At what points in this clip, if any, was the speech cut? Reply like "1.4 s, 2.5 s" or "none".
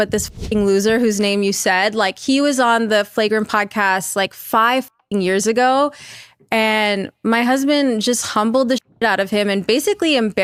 none

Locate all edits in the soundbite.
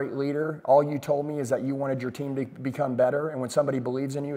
none

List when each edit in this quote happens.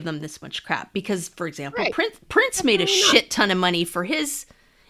none

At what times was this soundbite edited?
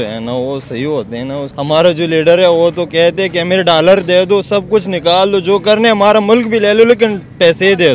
1.5 s

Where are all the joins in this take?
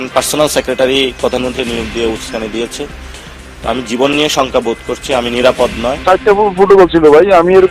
6.0 s

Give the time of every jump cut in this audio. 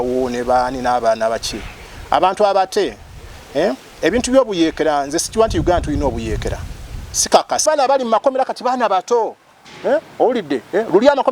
7.6 s

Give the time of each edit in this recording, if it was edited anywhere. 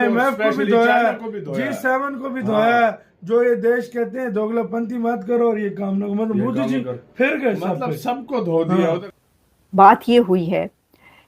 9.1 s

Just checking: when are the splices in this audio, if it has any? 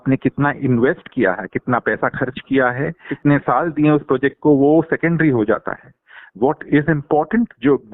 3.1 s

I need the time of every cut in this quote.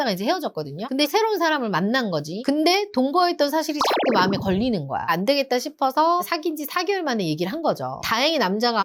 1.1 s, 5.1 s, 8.0 s

